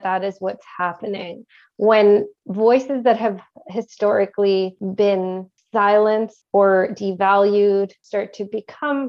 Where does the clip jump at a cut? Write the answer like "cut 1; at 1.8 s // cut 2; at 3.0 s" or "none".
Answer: cut 1; at 5.1 s // cut 2; at 6.4 s // cut 3; at 8.0 s

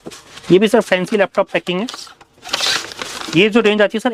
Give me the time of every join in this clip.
none

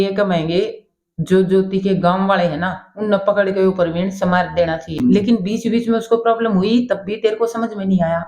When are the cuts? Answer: cut 1; at 5.0 s

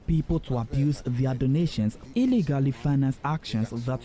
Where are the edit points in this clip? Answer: cut 1; at 2.0 s

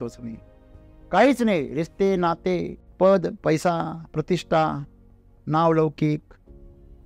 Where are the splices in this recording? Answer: cut 1; at 2.8 s

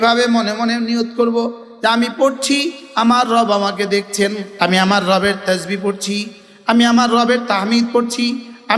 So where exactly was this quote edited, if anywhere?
cut 1; at 4.4 s

